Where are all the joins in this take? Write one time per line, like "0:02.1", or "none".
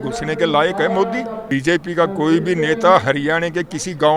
0:01.4